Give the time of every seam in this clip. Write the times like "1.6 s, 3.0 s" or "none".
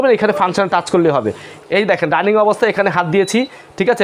1.7 s